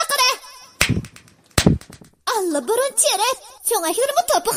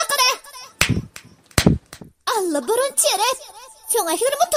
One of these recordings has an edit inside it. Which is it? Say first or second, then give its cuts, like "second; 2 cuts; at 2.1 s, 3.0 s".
first; 1 cut; at 3.5 s